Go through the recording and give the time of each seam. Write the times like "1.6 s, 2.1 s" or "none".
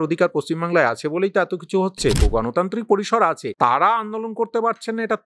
2.2 s, 3.5 s